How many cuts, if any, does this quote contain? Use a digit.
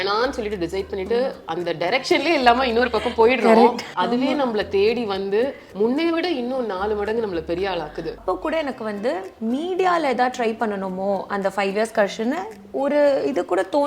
3